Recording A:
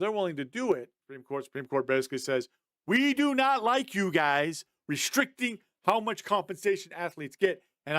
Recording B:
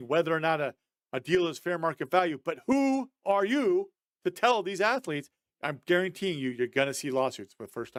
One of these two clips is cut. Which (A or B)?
A